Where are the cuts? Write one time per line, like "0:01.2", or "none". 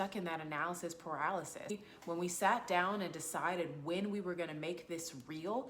0:01.7